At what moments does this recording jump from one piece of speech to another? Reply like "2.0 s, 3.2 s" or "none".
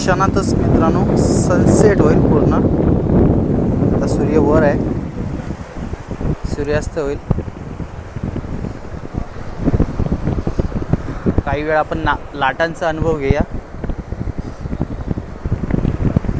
none

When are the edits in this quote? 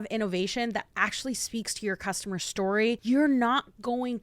3.0 s

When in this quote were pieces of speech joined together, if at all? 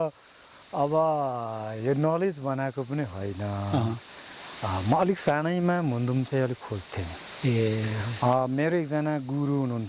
none

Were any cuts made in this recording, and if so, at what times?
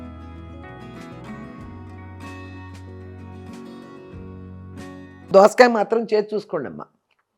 5.3 s

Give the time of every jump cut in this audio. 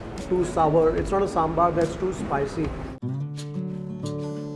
2.9 s

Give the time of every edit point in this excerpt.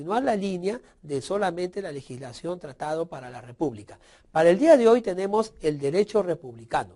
none

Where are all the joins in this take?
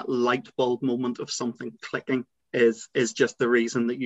2.4 s

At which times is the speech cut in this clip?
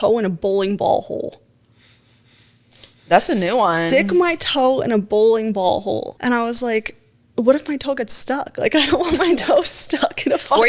6.1 s

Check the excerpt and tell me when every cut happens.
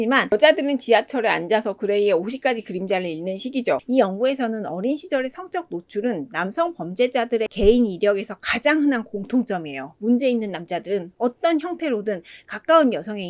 3.8 s

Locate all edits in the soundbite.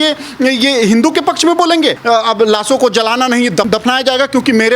2.0 s

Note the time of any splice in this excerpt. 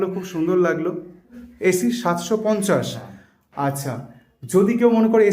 1.4 s

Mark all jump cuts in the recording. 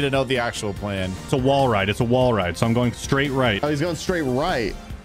1.3 s, 3.6 s

